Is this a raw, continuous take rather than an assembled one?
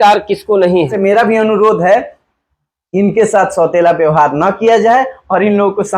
no; 1 cut; at 0.9 s

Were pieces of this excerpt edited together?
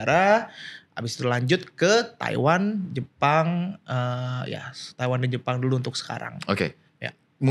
no; 0 cuts

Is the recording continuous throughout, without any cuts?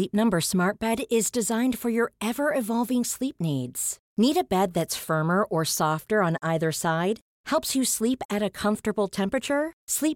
yes; 0 cuts

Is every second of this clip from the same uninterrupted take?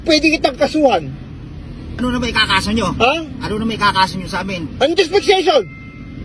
no; 1 cut; at 2.0 s

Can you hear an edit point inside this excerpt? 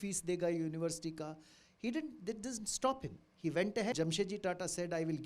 yes; 1 cut; at 3.9 s

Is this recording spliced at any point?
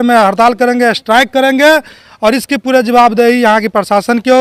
no; 0 cuts

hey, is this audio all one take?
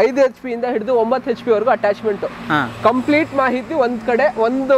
yes; 0 cuts

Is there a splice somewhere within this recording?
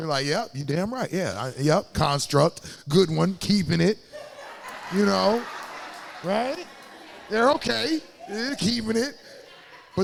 no; 0 cuts

